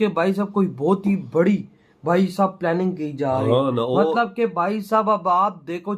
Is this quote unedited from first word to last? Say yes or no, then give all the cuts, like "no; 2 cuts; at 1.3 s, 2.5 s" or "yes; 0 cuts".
yes; 0 cuts